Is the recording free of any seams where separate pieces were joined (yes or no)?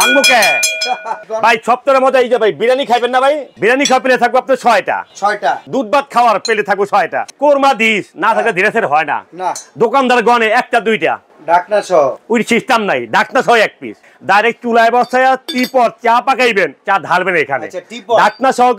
no